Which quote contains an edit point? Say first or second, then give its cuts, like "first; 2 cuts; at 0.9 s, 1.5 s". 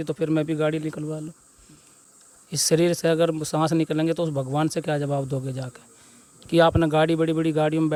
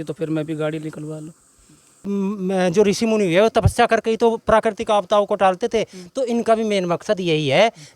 second; 1 cut; at 2.0 s